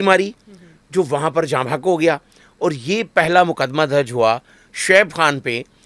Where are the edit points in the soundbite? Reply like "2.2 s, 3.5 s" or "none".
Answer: none